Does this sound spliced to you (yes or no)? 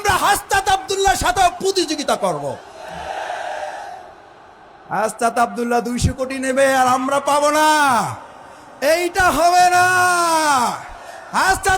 no